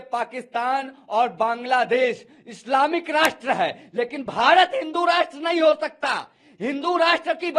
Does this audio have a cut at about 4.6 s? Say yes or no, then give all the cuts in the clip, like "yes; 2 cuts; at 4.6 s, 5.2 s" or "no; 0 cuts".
no; 0 cuts